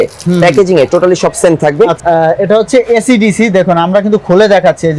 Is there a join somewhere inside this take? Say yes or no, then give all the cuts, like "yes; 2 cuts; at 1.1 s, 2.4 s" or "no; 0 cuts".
yes; 1 cut; at 2.0 s